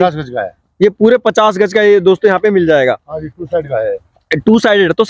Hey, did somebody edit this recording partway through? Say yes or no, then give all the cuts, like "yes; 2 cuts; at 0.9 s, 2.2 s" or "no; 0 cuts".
no; 0 cuts